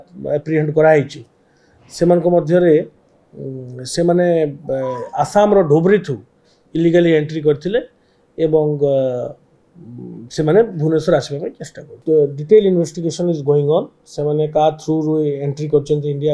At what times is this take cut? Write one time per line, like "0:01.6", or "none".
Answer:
0:11.9

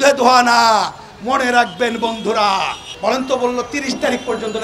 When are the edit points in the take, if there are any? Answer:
0:02.9

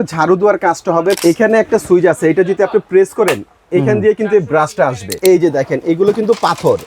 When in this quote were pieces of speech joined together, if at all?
0:01.2
0:05.2

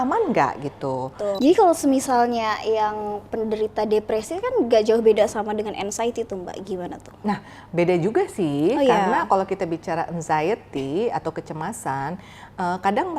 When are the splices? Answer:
0:01.4

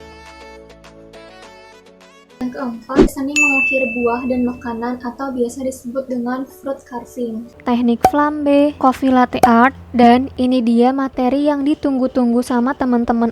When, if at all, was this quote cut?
0:03.1
0:07.4

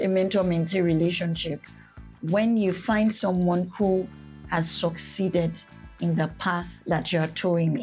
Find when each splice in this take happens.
none

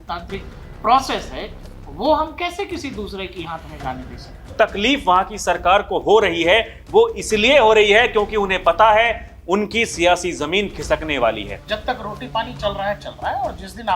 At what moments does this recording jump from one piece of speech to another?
0:04.5
0:11.5

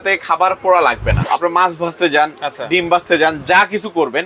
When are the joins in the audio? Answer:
0:01.2

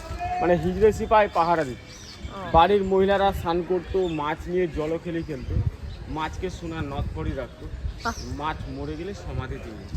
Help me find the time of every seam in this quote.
none

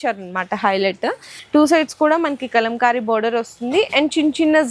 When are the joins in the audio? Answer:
0:01.3

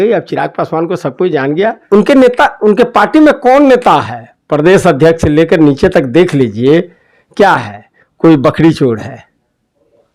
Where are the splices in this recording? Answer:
0:01.8

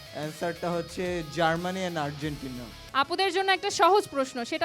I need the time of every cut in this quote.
0:02.8

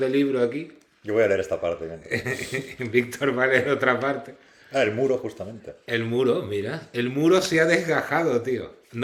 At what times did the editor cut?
none

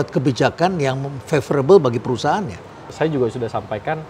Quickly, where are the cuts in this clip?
0:02.9

